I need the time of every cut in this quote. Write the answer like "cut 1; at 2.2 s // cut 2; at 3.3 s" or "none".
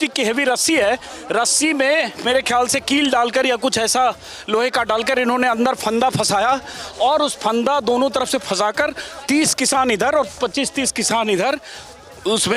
none